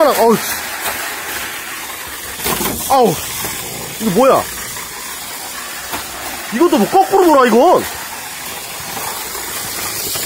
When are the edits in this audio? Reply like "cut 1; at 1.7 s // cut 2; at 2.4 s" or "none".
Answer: none